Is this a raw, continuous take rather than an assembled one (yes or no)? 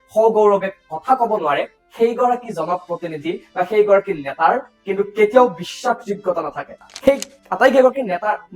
no